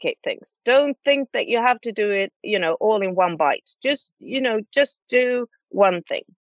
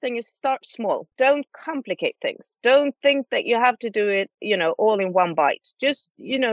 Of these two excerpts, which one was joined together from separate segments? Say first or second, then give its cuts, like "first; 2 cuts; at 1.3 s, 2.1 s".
second; 1 cut; at 1.1 s